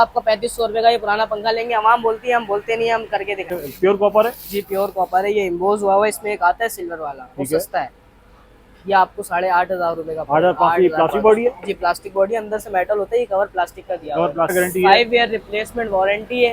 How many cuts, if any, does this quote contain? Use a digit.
2